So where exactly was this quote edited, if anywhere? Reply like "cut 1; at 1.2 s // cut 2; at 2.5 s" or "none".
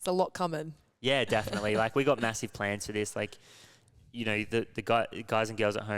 none